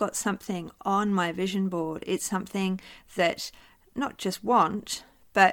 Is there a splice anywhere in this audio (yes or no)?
no